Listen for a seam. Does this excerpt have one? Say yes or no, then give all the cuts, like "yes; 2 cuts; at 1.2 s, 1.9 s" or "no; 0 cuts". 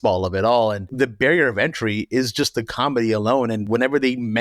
yes; 2 cuts; at 0.9 s, 3.6 s